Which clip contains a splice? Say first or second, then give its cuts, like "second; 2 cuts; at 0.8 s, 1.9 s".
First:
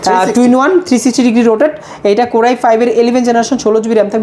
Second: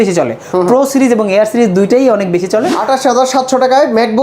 second; 1 cut; at 2.7 s